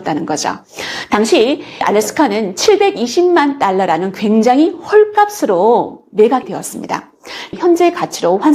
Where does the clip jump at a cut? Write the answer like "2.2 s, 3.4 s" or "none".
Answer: 1.8 s, 7.5 s

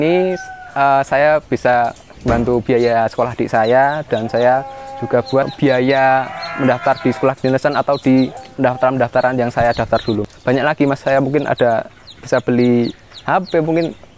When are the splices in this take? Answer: 2.1 s, 5.5 s, 8.4 s, 10.3 s

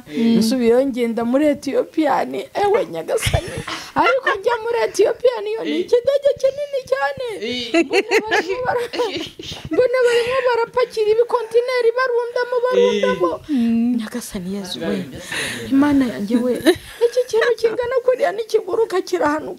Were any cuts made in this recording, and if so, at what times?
none

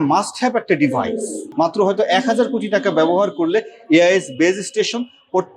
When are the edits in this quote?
1.4 s

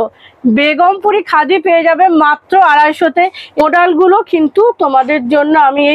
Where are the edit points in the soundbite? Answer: 3.6 s

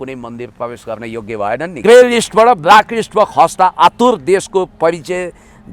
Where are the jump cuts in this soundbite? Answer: 1.7 s

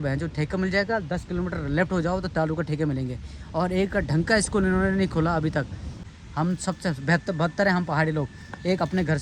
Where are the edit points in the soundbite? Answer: 5.9 s

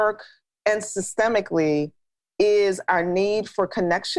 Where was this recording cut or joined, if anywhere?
none

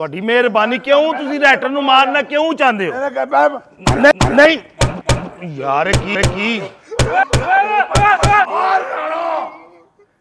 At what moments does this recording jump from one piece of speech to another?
8.5 s

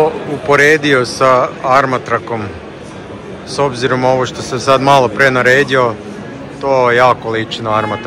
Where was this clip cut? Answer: none

